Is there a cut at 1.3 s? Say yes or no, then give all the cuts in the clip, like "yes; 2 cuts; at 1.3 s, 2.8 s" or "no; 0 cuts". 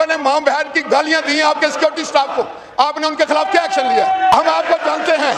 no; 1 cut; at 4.3 s